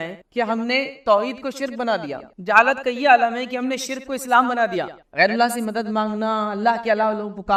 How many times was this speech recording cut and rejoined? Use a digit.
0